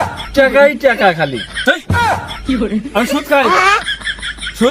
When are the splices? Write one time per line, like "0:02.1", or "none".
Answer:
0:01.6